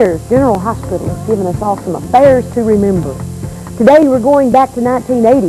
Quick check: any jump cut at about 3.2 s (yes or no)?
no